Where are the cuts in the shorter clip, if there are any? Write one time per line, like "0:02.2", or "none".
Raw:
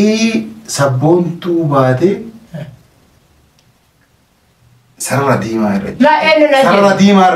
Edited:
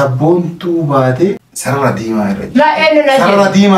0:01.5